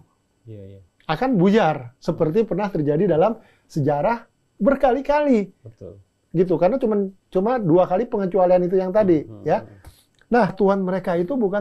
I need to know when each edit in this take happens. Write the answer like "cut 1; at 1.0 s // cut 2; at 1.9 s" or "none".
cut 1; at 10.5 s

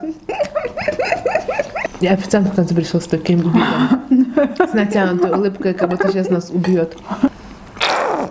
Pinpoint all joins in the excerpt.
cut 1; at 1.8 s // cut 2; at 7.3 s

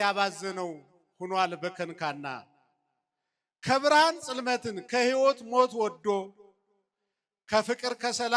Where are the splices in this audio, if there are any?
none

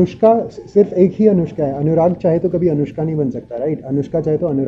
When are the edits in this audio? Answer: none

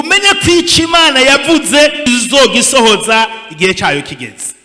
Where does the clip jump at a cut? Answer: cut 1; at 2.1 s

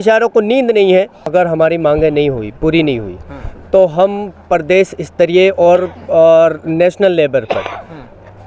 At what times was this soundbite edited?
cut 1; at 1.2 s

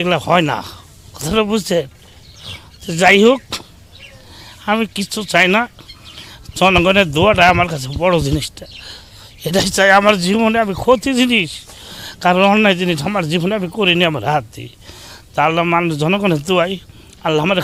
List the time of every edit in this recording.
none

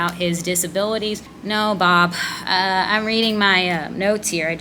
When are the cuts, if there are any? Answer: cut 1; at 1.3 s

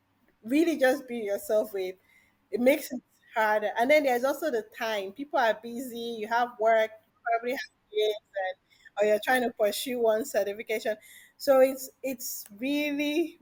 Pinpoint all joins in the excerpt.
none

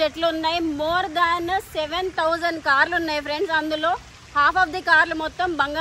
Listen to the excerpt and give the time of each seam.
none

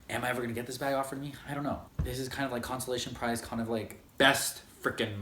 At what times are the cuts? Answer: cut 1; at 1.8 s // cut 2; at 4.0 s

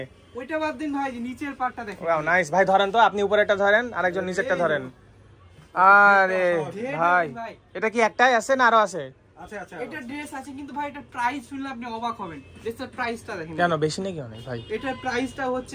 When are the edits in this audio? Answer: none

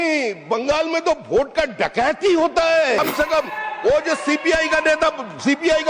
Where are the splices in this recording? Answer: cut 1; at 3.0 s

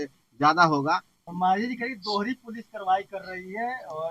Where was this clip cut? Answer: cut 1; at 1.1 s

